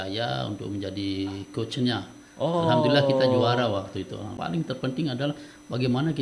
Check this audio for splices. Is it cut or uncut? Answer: cut